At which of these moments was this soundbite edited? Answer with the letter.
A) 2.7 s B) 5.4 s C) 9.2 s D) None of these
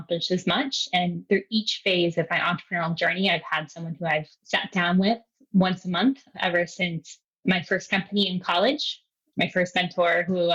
D